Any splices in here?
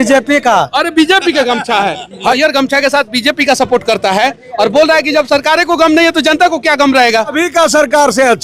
yes; 2 cuts; at 2.4 s, 7.3 s

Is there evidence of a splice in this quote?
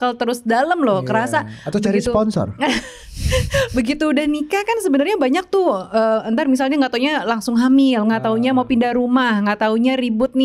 no; 0 cuts

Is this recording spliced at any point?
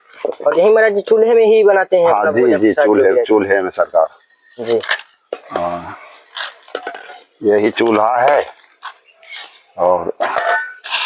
no; 0 cuts

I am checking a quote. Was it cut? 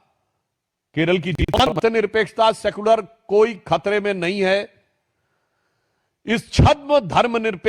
yes; 1 cut; at 1.6 s

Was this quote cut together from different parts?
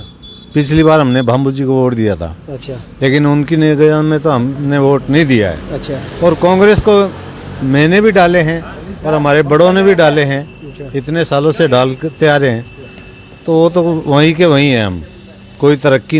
no; 0 cuts

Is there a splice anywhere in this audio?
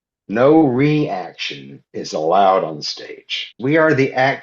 yes; 1 cut; at 3.4 s

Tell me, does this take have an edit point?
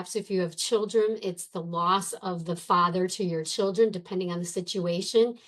no; 0 cuts

